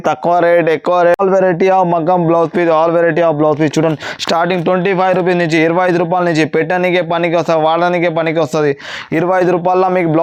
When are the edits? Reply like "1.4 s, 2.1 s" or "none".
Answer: none